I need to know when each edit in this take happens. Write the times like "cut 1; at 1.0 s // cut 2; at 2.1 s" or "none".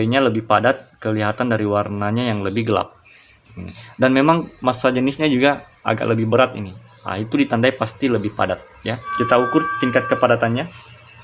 none